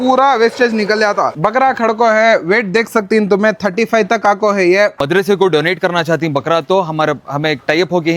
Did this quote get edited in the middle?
yes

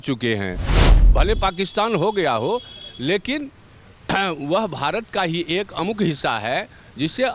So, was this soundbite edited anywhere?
yes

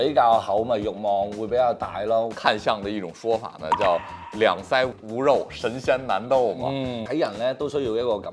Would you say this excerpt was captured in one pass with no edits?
no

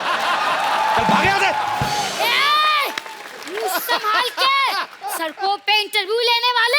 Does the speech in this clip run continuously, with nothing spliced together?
no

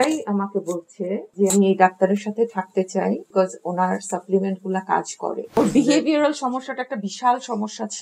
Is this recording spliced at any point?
yes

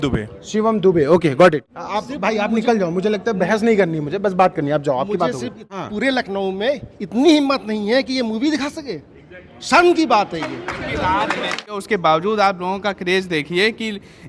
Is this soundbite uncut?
no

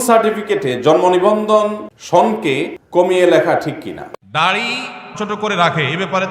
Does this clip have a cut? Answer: yes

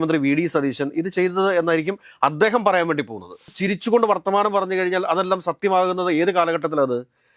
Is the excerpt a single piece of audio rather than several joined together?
no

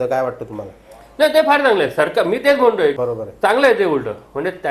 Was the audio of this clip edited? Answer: yes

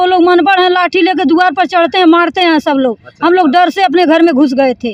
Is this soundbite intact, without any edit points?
yes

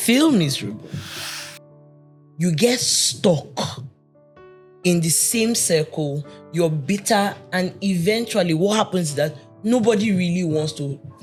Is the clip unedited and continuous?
yes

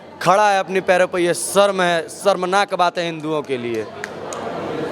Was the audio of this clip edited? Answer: no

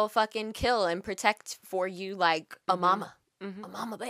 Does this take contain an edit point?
yes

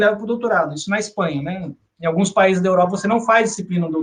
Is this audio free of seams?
yes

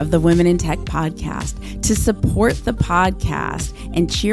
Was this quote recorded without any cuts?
yes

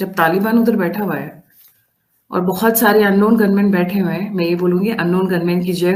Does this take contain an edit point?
no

